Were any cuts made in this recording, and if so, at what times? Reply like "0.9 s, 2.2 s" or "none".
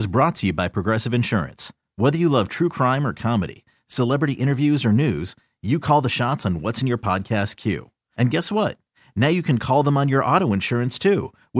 none